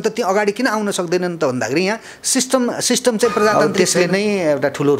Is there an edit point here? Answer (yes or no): yes